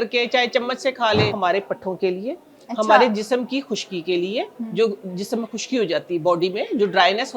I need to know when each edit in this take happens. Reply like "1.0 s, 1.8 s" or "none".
1.3 s